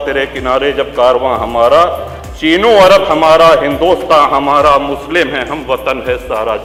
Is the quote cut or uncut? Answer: uncut